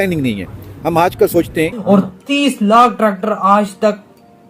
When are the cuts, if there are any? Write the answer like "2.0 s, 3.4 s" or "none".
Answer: 1.8 s